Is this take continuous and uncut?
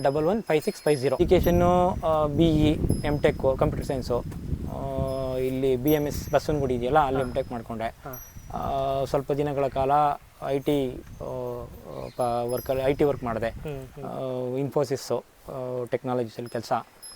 no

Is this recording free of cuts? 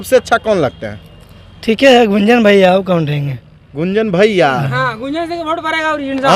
yes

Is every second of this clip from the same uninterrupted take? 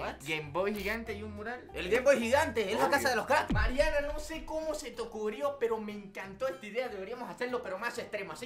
no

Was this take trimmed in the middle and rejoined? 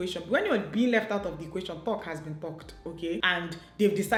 no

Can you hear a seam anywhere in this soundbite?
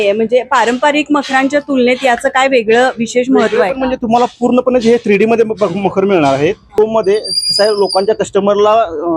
yes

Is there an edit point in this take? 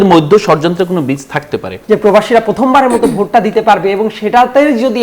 yes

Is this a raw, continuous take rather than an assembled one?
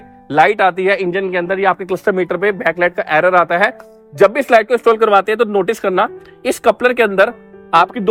yes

